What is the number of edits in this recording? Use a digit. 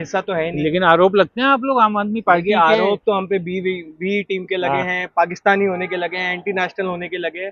0